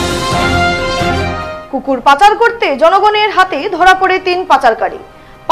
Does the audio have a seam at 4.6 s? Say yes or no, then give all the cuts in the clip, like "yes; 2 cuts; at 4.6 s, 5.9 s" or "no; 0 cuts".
no; 1 cut; at 1.3 s